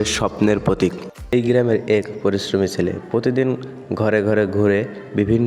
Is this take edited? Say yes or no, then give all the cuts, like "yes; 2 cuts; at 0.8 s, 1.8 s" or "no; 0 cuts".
yes; 1 cut; at 1.3 s